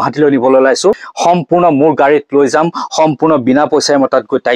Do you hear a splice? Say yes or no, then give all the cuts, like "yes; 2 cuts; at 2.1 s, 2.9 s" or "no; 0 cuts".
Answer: yes; 1 cut; at 1.1 s